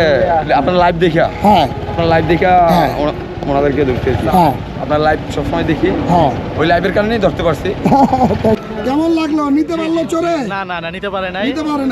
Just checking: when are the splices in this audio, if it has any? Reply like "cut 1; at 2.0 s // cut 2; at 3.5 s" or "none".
cut 1; at 8.6 s